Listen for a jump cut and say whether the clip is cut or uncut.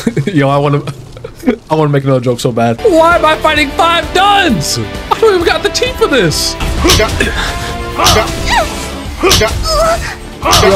cut